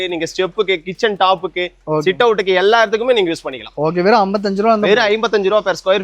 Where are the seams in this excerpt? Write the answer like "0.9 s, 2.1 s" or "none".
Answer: none